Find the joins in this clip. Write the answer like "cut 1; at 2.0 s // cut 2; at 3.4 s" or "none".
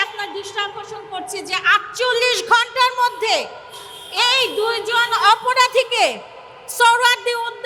none